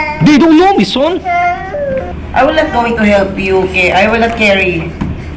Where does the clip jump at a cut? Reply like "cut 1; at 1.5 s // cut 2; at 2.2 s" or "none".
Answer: cut 1; at 2.2 s